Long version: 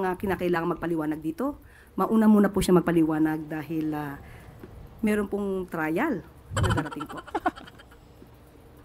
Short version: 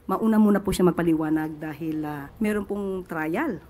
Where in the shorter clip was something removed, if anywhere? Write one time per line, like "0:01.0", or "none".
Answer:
0:02.2